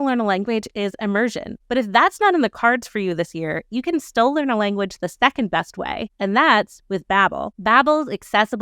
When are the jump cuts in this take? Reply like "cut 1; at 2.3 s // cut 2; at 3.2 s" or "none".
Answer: cut 1; at 1.5 s // cut 2; at 7.4 s

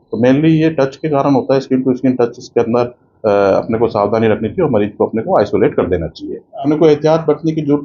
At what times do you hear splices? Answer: cut 1; at 6.6 s

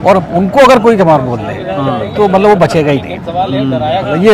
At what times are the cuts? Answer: none

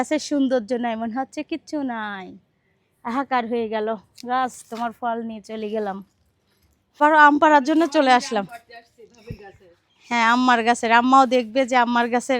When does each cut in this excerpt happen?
cut 1; at 7.0 s

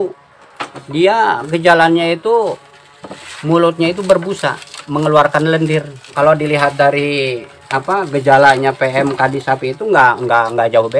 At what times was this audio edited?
cut 1; at 6.1 s

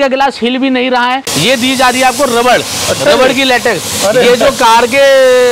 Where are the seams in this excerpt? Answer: cut 1; at 1.3 s

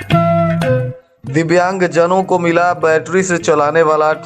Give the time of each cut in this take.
cut 1; at 1.0 s

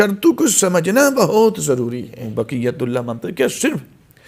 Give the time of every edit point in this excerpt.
cut 1; at 2.3 s

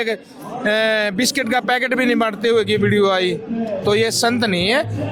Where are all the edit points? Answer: none

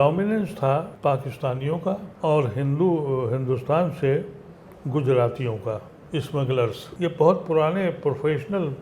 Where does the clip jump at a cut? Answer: cut 1; at 0.9 s // cut 2; at 2.1 s // cut 3; at 6.8 s

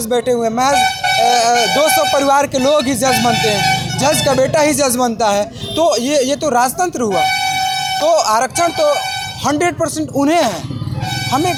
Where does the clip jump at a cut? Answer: none

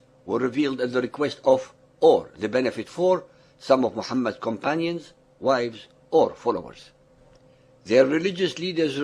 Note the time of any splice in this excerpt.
none

